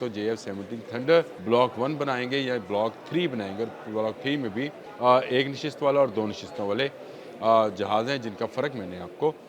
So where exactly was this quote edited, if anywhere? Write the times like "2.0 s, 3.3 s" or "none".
1.4 s, 4.8 s